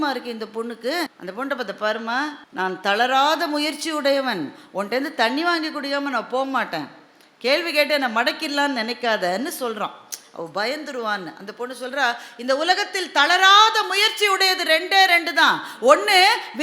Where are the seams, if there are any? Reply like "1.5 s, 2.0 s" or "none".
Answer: 1.2 s, 2.4 s